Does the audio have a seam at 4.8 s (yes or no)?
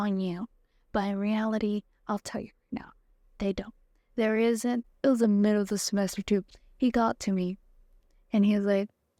yes